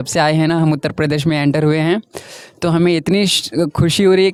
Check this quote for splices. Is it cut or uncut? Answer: uncut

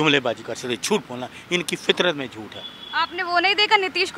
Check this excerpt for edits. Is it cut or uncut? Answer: uncut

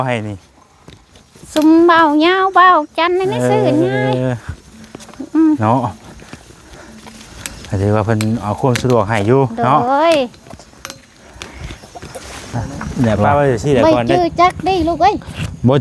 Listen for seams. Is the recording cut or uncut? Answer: cut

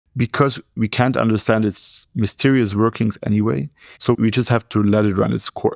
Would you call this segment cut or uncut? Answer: uncut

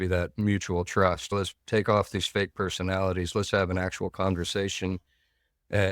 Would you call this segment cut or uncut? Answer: cut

